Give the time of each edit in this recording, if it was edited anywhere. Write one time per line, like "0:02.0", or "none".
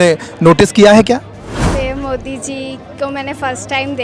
0:01.7